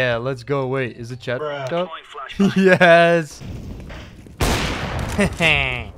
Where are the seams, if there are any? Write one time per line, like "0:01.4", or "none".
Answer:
0:03.4